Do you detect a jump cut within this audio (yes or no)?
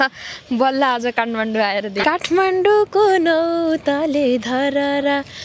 yes